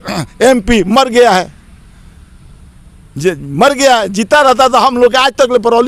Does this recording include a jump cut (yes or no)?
no